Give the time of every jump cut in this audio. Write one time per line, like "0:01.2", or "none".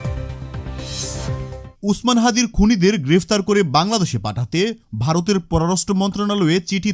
0:01.7